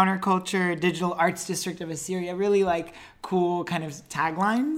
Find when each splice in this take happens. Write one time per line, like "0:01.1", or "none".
none